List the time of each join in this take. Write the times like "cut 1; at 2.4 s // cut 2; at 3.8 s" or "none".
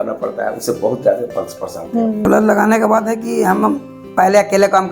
cut 1; at 2.2 s